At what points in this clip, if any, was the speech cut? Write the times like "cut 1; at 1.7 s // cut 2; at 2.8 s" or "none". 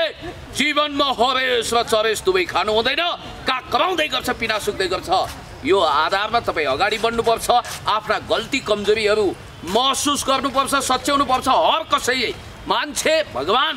none

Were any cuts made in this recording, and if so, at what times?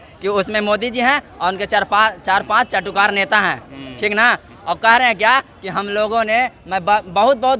none

